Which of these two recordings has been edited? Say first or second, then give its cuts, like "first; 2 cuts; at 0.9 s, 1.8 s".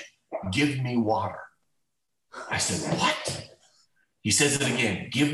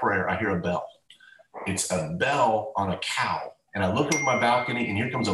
second; 1 cut; at 3.6 s